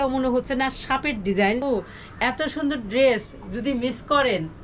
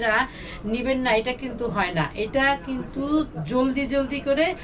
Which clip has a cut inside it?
first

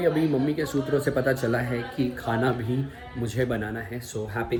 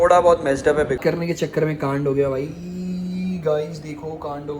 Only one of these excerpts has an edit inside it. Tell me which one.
second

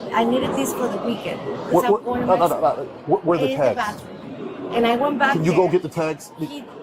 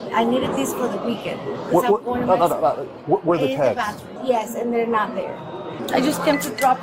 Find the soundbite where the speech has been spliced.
second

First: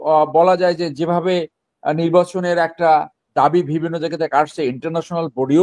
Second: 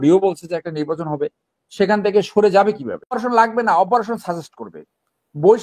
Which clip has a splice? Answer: second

